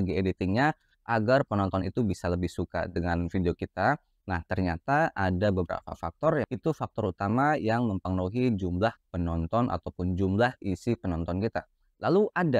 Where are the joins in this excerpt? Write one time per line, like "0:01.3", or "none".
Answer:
0:06.5